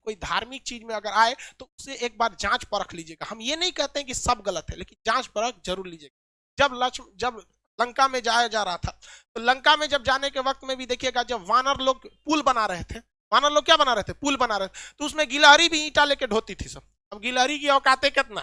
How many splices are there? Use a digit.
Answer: 0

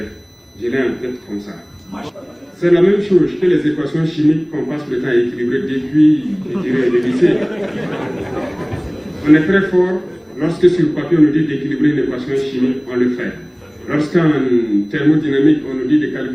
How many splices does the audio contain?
0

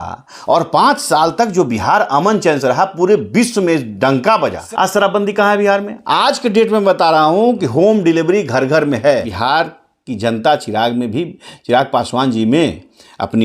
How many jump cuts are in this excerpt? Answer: 2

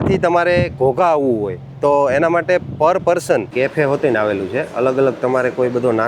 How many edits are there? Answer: 1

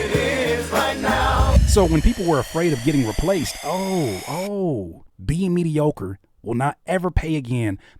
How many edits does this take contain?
1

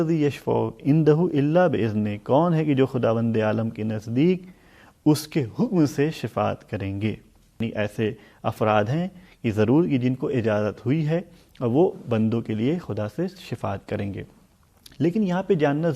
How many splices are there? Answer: 1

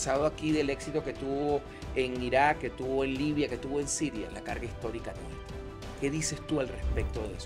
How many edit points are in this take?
0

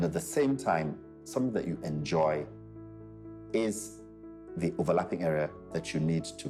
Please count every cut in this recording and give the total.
0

